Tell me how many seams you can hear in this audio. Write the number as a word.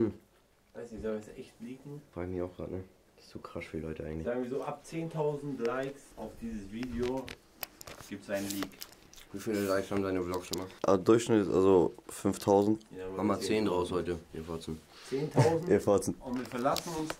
zero